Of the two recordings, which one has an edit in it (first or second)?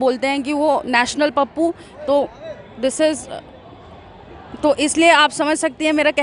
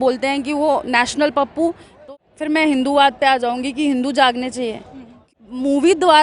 second